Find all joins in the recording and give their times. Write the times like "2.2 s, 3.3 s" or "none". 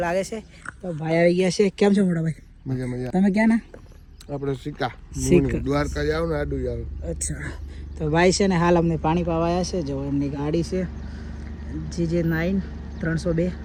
none